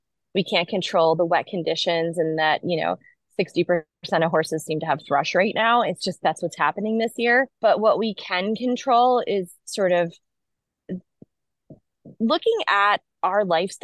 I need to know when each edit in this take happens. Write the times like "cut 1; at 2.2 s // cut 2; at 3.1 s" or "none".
cut 1; at 7.5 s